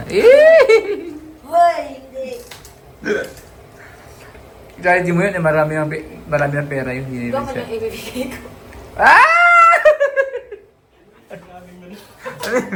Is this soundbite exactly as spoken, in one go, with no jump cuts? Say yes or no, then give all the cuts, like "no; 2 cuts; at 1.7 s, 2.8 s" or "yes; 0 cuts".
yes; 0 cuts